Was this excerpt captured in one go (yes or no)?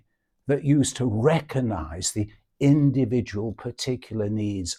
yes